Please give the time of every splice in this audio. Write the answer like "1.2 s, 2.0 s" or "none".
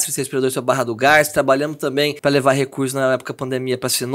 2.2 s